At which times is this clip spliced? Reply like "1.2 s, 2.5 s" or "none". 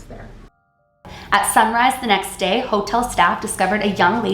1.1 s